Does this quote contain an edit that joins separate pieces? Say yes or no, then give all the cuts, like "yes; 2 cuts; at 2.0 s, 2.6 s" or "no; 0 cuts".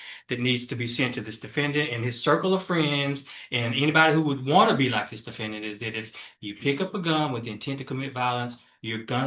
no; 0 cuts